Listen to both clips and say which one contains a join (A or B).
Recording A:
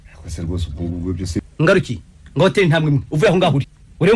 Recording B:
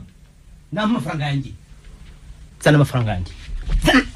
A